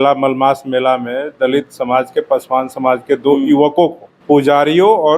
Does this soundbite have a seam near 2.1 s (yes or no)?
no